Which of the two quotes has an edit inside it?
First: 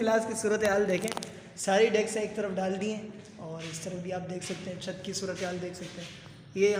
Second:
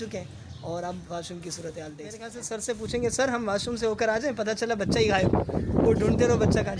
second; 1 cut; at 2.4 s

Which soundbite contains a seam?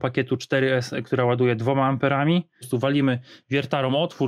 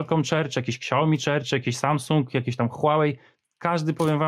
first; 1 cut; at 2.6 s

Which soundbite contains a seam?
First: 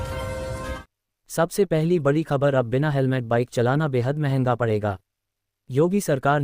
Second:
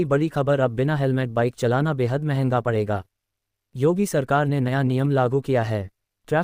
first; 1 cut; at 0.9 s

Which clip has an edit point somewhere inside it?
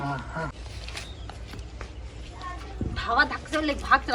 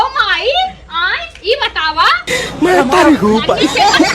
second; 1 cut; at 2.2 s

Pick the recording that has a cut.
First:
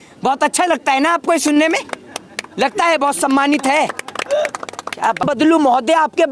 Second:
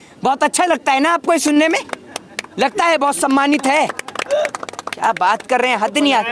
first; 1 cut; at 5.2 s

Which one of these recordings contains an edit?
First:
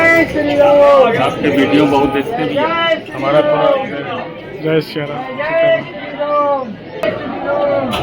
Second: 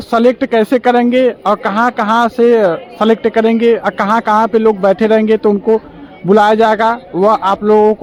first; 1 cut; at 7.0 s

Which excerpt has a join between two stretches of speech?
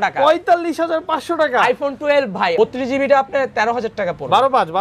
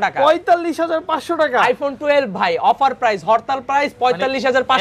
first; 1 cut; at 2.6 s

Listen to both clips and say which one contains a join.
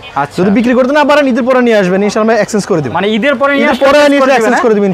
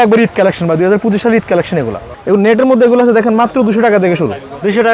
second; 1 cut; at 2.1 s

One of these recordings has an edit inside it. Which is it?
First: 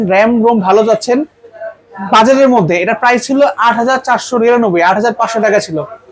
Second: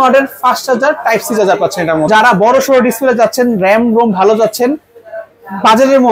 second; 1 cut; at 2.1 s

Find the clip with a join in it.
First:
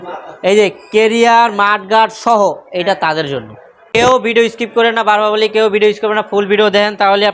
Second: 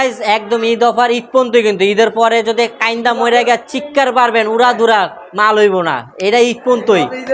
first; 1 cut; at 3.9 s

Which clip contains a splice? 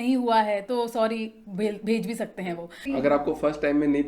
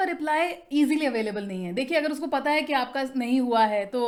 first; 1 cut; at 2.8 s

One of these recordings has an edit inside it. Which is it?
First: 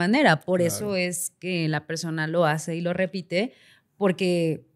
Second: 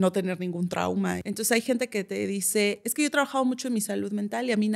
second; 2 cuts; at 1.2 s, 2.9 s

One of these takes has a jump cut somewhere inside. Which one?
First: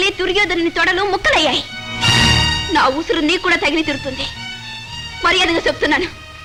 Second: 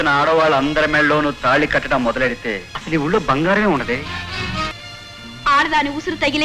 second; 2 cuts; at 2.7 s, 4.6 s

